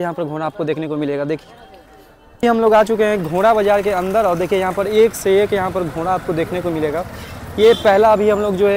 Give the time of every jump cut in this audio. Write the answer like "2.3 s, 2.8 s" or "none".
none